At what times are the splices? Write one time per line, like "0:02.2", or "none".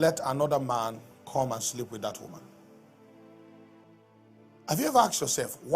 0:03.8